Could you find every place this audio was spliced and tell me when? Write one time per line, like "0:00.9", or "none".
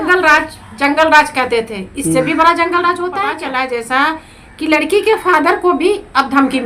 0:03.4